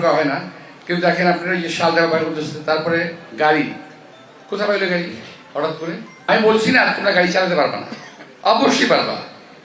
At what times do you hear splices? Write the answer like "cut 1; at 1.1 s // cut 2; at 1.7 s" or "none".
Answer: cut 1; at 6.3 s